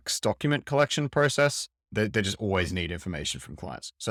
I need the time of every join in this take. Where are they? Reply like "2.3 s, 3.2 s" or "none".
none